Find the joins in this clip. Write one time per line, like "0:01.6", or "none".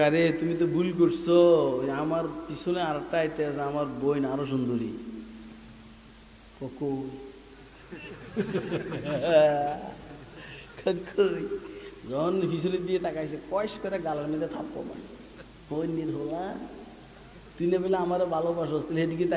none